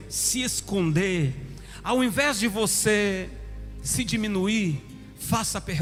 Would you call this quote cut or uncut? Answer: uncut